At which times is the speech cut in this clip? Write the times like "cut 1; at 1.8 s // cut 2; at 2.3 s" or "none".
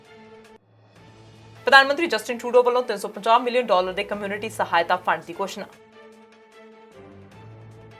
none